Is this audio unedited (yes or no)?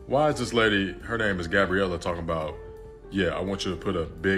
yes